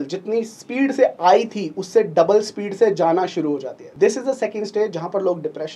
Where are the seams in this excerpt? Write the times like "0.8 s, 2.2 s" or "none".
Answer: 3.8 s